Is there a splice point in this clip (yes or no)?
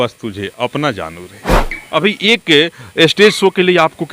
yes